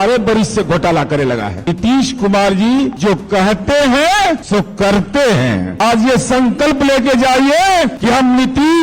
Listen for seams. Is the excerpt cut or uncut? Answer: cut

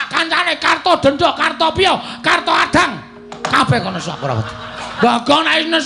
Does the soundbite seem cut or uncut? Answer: cut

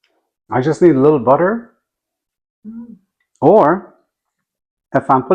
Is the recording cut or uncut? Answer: uncut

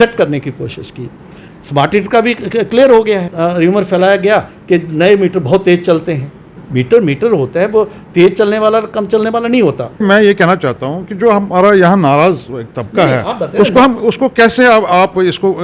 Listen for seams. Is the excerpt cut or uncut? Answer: cut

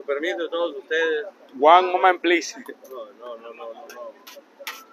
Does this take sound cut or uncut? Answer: uncut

